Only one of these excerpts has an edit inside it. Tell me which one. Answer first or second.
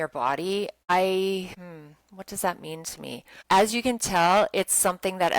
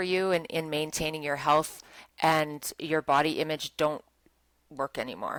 first